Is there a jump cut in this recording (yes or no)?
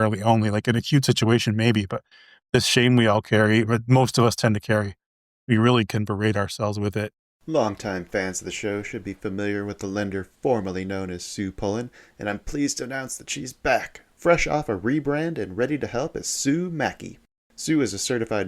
yes